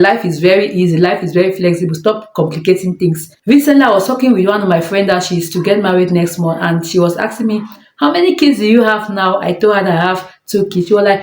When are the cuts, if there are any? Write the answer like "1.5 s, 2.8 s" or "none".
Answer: 3.3 s